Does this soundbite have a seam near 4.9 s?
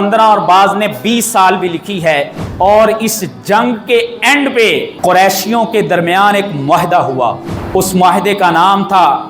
yes; 3 cuts; at 2.4 s, 4.9 s, 7.5 s

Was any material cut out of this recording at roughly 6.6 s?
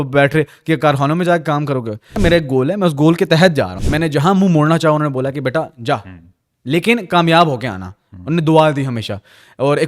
no; 2 cuts; at 2.2 s, 3.8 s

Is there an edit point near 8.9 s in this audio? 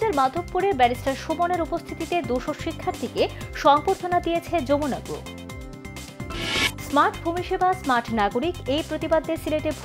no; 0 cuts

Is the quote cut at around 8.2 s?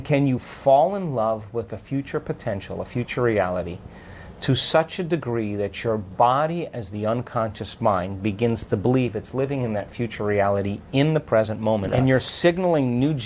no; 1 cut; at 11.9 s

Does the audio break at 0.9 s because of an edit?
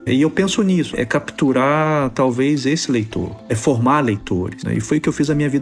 yes; 1 cut; at 0.9 s

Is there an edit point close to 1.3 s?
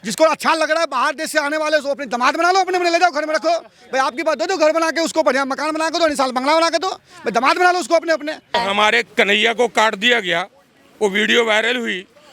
no; 1 cut; at 8.5 s

